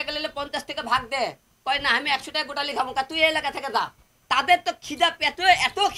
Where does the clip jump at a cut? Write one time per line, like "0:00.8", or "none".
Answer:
none